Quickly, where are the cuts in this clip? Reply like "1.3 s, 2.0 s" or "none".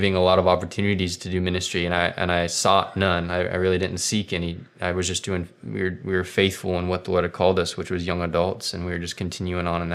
none